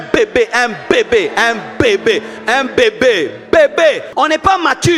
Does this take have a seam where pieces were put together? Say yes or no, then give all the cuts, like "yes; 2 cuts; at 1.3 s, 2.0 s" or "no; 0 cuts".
yes; 1 cut; at 4.1 s